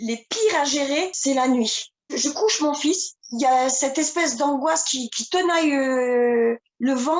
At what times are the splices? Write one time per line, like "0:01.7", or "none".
0:01.1
0:03.2